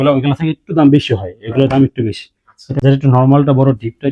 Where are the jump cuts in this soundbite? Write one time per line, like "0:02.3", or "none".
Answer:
0:02.6